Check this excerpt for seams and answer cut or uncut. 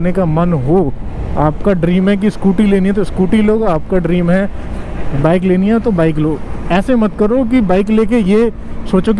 uncut